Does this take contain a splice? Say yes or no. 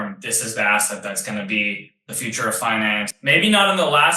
yes